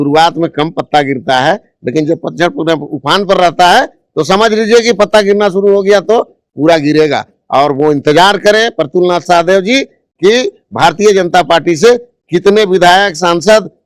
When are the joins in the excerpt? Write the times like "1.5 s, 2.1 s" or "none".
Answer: none

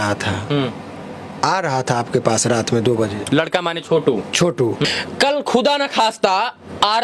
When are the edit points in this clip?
4.8 s

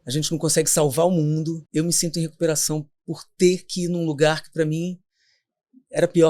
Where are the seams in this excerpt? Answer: 1.6 s

